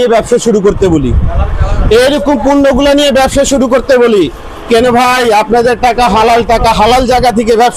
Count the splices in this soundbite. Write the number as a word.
zero